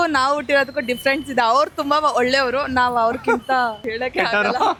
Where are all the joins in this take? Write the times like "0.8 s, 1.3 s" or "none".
none